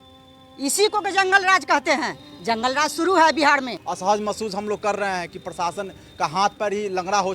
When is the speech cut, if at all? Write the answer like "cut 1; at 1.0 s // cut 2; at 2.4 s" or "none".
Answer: cut 1; at 3.8 s